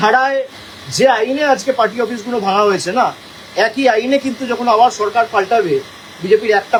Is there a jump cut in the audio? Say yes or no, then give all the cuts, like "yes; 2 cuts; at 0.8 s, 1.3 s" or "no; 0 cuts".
no; 0 cuts